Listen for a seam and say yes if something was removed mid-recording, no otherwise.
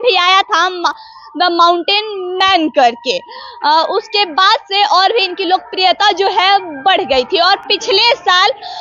no